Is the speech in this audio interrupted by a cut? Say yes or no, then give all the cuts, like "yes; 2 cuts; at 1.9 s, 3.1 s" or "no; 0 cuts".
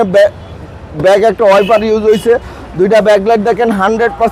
no; 0 cuts